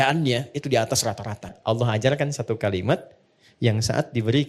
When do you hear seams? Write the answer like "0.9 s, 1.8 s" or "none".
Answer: 1.5 s